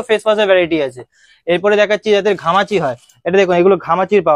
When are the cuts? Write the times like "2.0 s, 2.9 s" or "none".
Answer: none